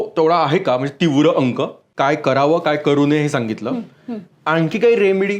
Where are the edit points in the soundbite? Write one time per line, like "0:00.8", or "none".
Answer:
0:01.9